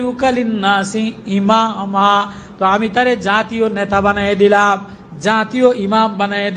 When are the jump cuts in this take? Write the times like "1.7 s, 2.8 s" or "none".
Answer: none

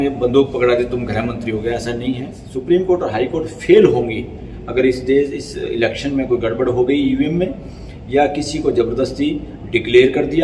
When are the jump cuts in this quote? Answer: 2.4 s

